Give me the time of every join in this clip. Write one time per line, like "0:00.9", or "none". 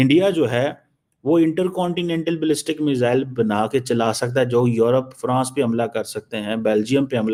none